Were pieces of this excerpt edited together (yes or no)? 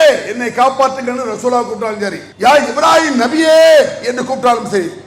yes